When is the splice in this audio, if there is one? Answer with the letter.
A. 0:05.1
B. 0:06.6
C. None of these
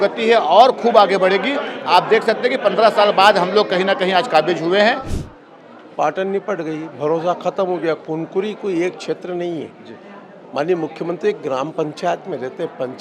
A